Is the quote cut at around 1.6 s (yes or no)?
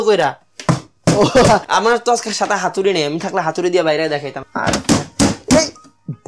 yes